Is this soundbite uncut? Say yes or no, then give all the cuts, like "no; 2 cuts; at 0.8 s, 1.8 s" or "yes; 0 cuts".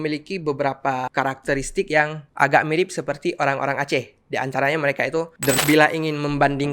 no; 1 cut; at 5.6 s